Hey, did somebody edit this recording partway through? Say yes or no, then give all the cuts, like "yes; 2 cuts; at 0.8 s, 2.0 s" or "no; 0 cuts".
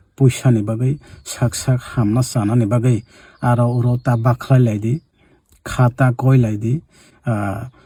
no; 0 cuts